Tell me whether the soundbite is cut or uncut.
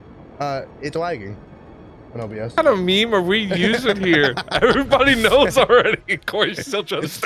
cut